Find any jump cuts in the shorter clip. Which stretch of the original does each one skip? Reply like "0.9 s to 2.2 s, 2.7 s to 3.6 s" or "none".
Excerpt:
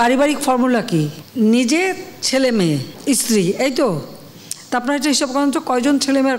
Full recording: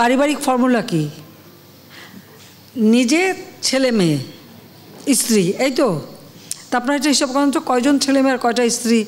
1.2 s to 2.6 s, 4.3 s to 4.9 s